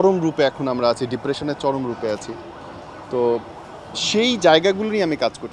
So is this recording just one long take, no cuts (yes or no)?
yes